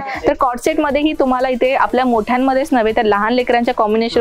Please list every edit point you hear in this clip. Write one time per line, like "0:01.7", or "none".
none